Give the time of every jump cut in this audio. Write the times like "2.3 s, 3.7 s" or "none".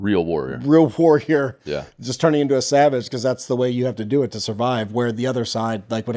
none